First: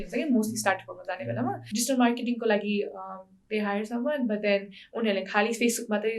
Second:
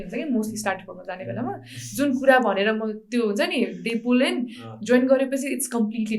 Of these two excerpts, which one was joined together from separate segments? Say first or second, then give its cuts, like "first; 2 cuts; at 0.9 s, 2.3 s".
first; 1 cut; at 1.6 s